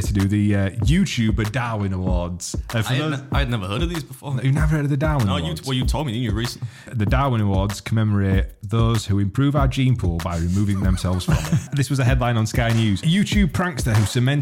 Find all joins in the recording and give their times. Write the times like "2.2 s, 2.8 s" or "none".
6.9 s, 11.6 s, 13.0 s